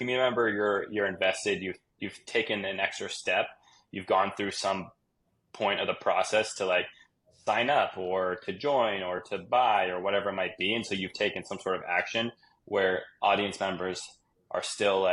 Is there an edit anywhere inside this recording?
no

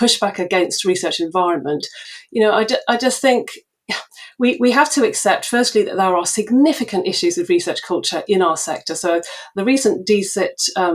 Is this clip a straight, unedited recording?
no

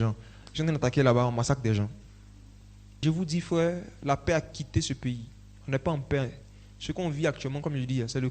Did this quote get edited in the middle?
yes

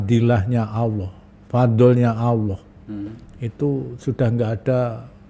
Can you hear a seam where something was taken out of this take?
no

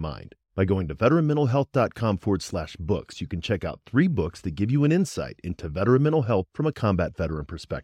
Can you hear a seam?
no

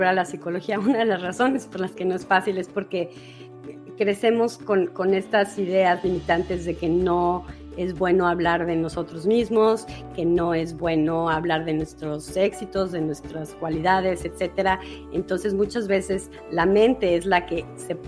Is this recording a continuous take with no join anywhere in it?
yes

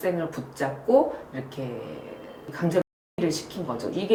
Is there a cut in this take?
no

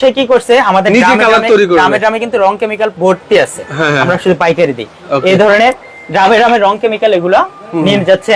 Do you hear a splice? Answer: no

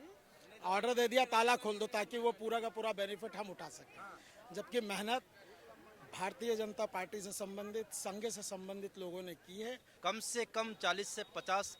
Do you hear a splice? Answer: yes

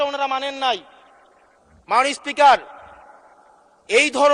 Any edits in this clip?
no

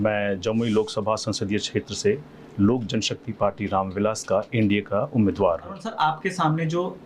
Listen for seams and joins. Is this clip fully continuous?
no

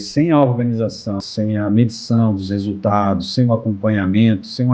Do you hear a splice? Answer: yes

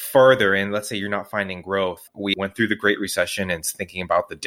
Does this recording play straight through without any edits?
no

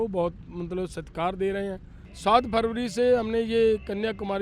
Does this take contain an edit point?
yes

